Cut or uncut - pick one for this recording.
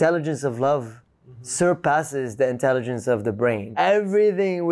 cut